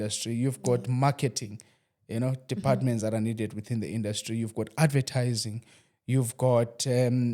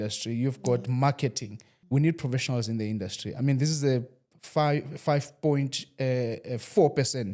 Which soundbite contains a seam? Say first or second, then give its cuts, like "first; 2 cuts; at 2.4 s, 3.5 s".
second; 1 cut; at 1.7 s